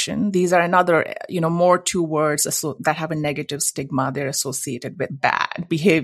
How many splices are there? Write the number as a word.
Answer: one